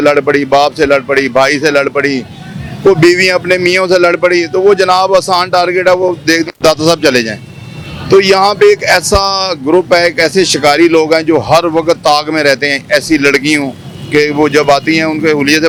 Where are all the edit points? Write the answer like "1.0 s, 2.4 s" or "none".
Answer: none